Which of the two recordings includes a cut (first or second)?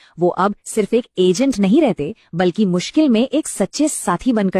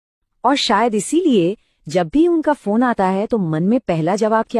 second